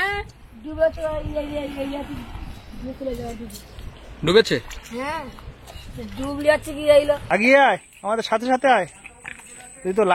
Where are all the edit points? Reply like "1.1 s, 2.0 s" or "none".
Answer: 7.2 s